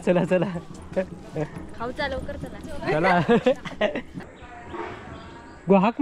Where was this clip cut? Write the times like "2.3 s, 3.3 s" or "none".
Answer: none